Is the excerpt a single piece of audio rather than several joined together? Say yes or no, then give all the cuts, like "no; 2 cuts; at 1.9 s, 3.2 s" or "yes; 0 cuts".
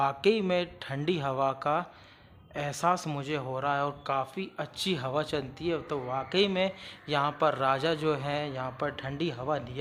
yes; 0 cuts